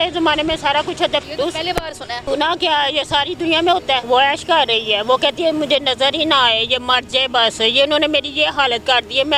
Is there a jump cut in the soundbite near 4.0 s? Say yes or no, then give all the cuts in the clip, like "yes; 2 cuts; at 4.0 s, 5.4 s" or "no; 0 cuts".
yes; 3 cuts; at 1.2 s, 2.2 s, 4.0 s